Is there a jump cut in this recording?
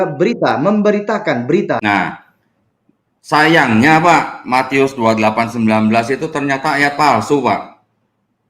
yes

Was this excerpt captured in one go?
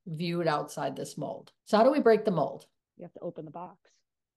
no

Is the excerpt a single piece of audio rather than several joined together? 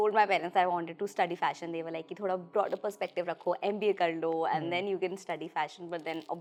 yes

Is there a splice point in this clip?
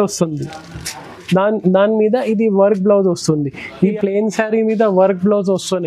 yes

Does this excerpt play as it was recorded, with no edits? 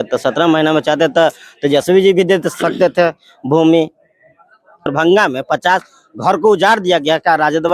no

